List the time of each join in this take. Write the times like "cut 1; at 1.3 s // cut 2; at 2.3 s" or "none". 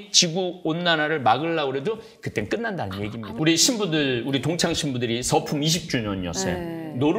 cut 1; at 3.3 s